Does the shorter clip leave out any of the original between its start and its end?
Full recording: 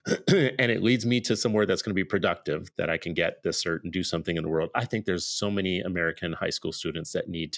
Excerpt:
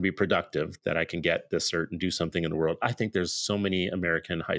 no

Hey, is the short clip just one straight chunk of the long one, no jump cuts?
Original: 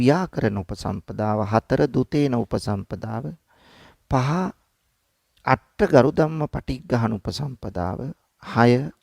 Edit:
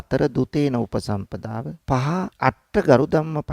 no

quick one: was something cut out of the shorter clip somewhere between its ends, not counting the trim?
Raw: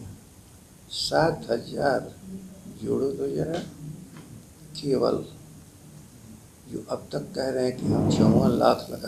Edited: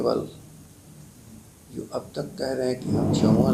no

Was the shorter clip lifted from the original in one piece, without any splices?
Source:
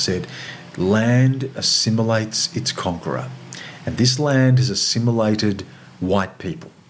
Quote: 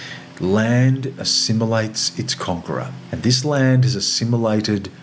no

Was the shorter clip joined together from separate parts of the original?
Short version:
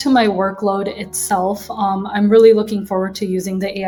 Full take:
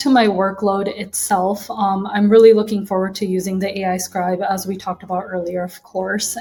no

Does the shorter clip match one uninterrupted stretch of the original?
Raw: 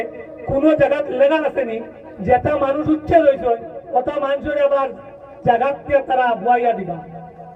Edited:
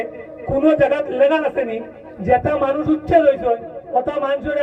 yes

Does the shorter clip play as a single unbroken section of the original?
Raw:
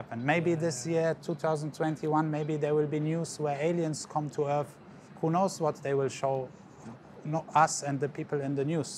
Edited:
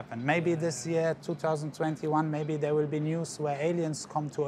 yes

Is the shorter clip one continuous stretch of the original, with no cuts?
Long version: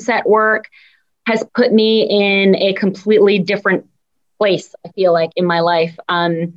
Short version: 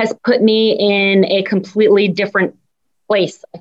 yes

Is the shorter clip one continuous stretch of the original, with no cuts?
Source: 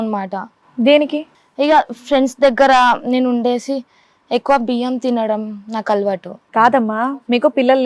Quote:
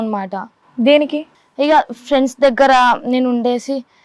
yes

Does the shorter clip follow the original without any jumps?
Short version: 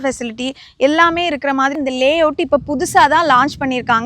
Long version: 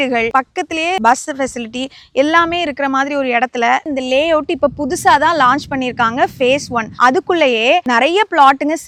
no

